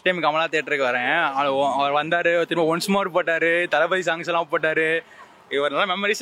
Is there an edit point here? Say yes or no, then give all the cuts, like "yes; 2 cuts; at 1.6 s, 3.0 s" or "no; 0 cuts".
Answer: no; 0 cuts